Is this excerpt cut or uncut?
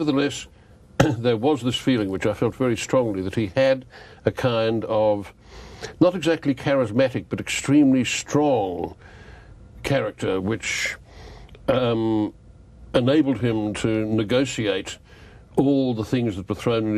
cut